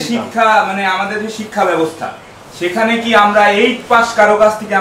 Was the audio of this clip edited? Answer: no; 0 cuts

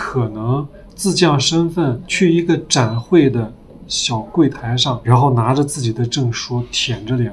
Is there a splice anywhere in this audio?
yes; 2 cuts; at 2.0 s, 5.0 s

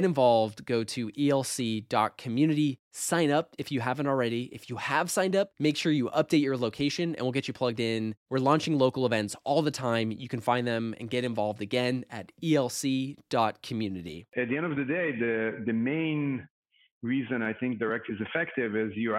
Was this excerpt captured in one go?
no; 1 cut; at 14.2 s

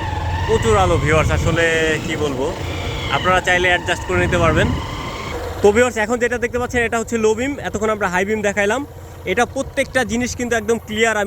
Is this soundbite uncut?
no; 1 cut; at 5.3 s

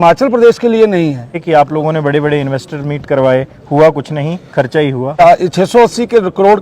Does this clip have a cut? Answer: yes; 2 cuts; at 1.4 s, 5.2 s

